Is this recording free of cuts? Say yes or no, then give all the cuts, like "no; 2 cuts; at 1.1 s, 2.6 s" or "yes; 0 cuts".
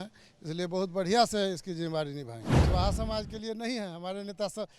no; 1 cut; at 2.7 s